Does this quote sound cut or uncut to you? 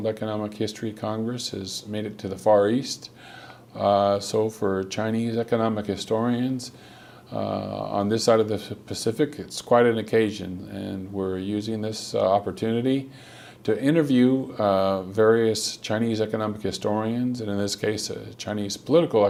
uncut